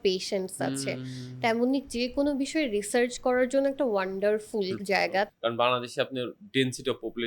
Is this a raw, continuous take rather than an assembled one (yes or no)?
no